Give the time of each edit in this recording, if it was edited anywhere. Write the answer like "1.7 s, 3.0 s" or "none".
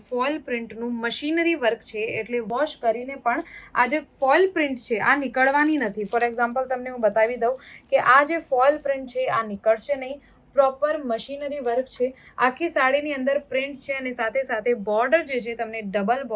none